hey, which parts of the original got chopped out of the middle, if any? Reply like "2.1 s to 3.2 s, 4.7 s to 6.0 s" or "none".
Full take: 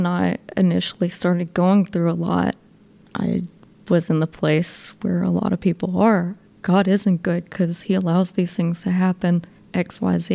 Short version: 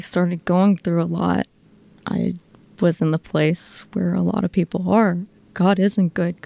none